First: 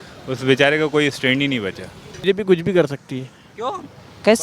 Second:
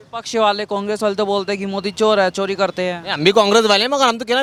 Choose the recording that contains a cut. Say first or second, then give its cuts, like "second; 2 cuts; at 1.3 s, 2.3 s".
first; 1 cut; at 2.2 s